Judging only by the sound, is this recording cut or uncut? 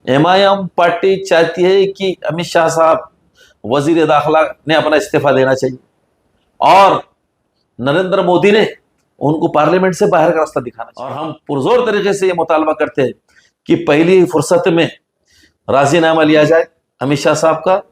cut